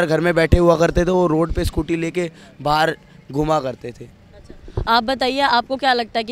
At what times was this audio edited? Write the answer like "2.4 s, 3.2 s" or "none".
none